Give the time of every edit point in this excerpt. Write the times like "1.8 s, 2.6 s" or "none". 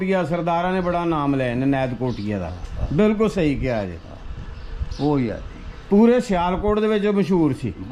none